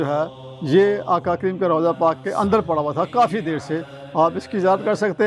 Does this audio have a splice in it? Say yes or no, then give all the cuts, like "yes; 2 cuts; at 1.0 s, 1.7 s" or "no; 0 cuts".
no; 0 cuts